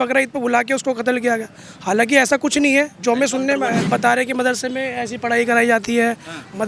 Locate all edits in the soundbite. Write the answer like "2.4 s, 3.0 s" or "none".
3.9 s